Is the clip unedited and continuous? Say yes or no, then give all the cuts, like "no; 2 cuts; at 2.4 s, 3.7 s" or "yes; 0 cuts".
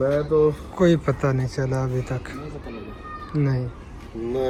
yes; 0 cuts